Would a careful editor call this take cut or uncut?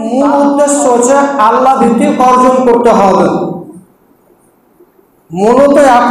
uncut